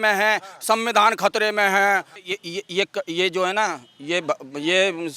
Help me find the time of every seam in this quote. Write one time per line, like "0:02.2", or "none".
0:02.1